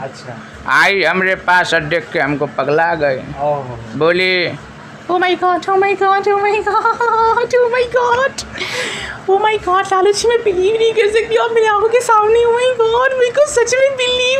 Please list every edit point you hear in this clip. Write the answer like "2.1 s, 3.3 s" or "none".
none